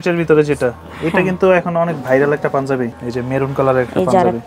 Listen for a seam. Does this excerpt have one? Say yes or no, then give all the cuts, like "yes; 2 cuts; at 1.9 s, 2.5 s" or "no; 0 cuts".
yes; 1 cut; at 2.9 s